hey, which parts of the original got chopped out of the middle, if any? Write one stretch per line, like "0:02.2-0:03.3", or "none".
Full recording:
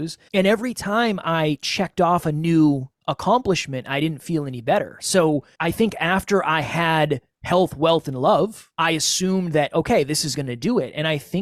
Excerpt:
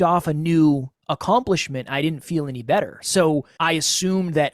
0:05.5-0:08.7

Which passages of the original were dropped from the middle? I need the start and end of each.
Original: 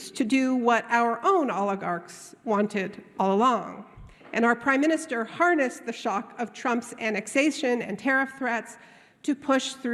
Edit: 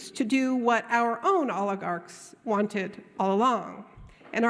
none

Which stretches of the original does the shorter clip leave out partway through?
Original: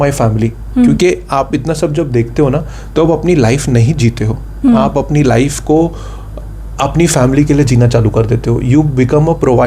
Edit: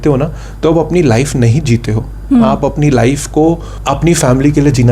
0:06.0-0:06.6

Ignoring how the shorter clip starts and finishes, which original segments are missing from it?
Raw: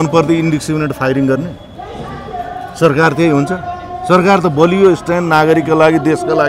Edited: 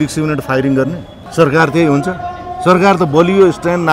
0:01.7-0:02.6

